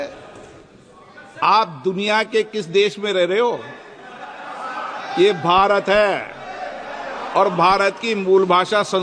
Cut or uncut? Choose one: uncut